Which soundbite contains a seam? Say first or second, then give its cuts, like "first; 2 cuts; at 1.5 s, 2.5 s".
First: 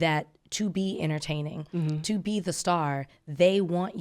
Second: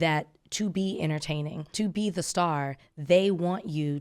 second; 1 cut; at 1.7 s